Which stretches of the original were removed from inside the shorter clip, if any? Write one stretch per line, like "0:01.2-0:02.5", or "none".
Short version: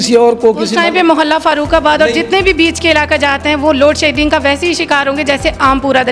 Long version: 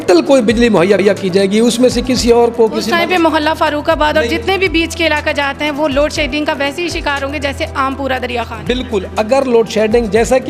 none